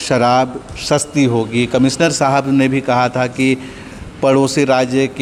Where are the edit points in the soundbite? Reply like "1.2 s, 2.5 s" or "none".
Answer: none